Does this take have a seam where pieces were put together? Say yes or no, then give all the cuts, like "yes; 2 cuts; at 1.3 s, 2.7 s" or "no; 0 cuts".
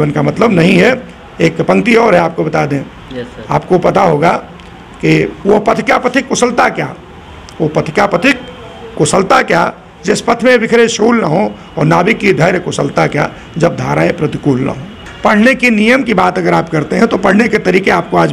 yes; 1 cut; at 15.0 s